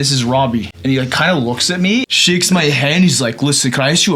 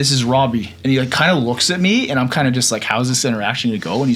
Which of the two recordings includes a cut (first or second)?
first